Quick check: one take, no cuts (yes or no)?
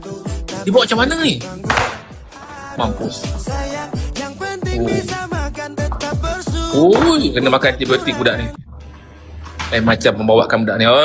yes